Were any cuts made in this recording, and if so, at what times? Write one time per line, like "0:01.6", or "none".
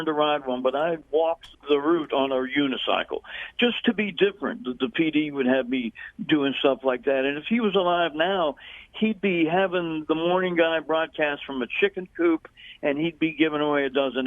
0:01.0